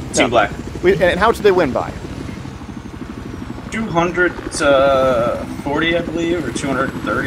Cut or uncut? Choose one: cut